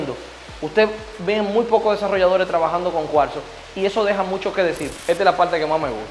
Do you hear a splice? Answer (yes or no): yes